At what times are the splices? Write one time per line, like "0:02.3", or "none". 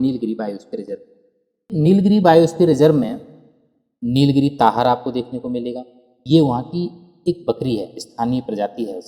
0:01.7

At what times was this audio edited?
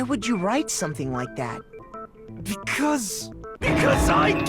0:01.8

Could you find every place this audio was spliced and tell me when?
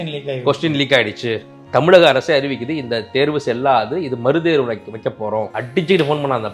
0:05.6

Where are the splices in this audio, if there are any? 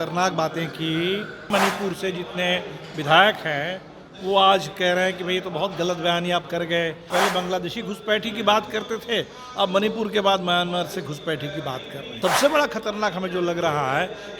0:01.5
0:07.1
0:12.2

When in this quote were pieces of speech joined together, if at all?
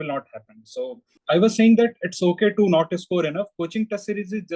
0:01.2

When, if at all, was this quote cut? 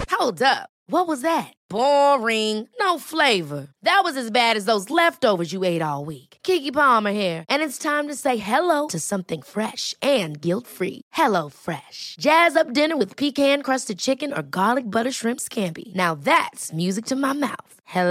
none

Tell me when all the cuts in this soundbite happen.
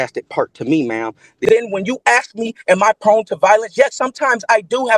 0:01.4

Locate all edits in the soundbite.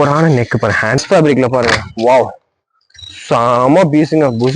0:01.0

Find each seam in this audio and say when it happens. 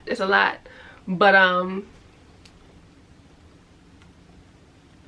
none

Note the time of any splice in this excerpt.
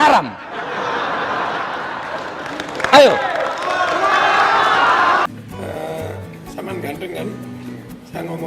0:05.3

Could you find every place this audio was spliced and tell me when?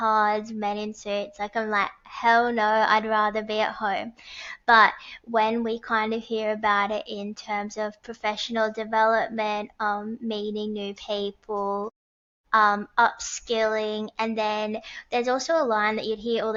none

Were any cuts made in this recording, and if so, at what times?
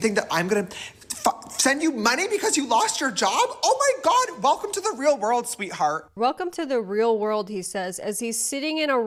none

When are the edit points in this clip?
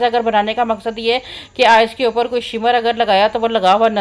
none

